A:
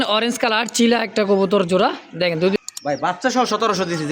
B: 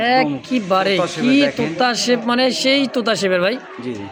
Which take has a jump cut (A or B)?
A